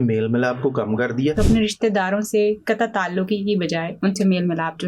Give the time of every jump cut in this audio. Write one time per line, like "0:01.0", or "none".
0:01.3
0:03.9